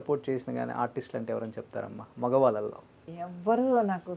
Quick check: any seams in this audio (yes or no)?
yes